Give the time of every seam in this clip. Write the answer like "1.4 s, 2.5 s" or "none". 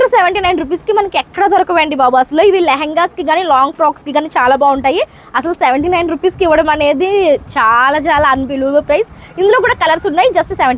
none